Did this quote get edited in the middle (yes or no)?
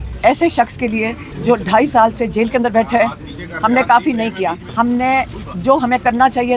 yes